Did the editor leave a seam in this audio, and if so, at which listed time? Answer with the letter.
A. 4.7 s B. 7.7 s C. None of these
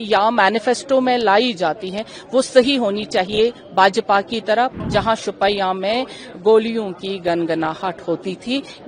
A